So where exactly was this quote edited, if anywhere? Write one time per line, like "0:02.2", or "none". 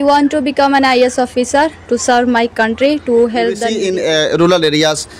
0:03.7